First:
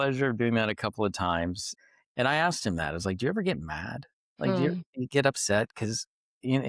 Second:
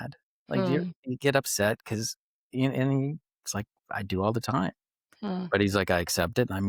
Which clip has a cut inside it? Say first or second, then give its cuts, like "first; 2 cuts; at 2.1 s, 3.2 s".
first; 1 cut; at 1.7 s